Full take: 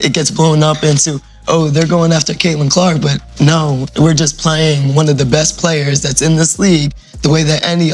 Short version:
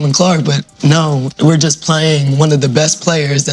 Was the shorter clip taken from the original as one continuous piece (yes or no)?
yes